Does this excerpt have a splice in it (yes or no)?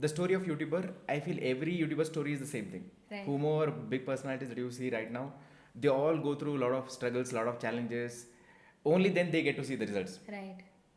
no